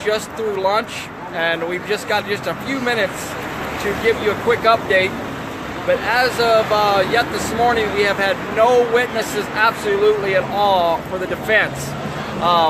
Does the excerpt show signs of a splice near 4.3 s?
no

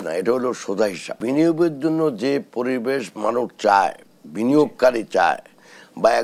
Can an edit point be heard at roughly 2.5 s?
no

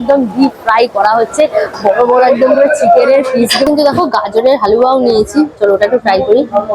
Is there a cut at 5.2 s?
no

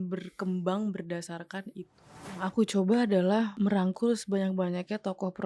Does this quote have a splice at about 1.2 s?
no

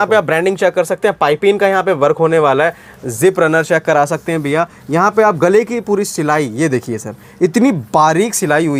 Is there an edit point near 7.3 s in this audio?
no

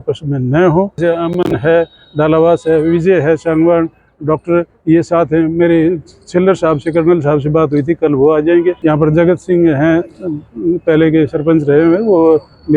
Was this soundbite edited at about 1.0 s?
yes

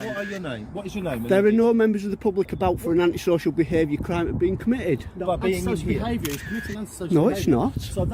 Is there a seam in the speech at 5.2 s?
no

